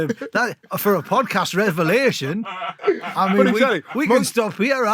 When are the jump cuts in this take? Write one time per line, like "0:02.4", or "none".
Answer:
none